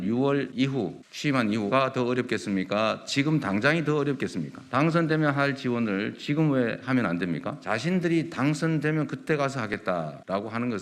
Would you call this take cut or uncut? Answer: cut